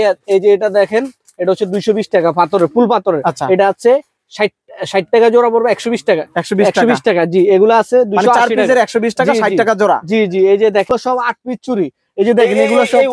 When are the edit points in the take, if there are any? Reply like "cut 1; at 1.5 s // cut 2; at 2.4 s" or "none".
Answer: cut 1; at 10.9 s